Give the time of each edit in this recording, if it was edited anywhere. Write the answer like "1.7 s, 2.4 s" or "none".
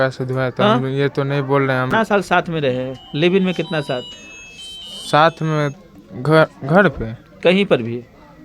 1.9 s